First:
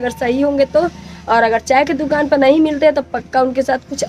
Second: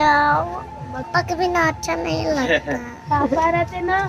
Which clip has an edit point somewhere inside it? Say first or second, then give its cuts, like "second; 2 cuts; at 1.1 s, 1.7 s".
second; 1 cut; at 1.1 s